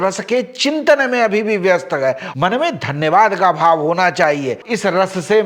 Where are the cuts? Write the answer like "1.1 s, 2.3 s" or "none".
2.3 s